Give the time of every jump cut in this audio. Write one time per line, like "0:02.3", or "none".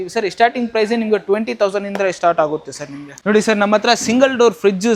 none